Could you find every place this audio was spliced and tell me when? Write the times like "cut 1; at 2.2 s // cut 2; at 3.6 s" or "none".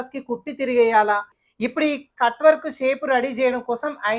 cut 1; at 1.4 s